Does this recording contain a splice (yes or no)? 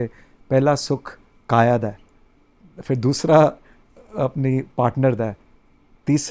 no